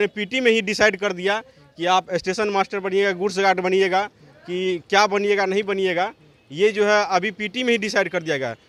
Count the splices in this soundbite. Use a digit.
0